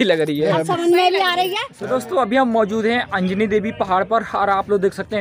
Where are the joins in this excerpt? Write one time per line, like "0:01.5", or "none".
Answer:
0:01.7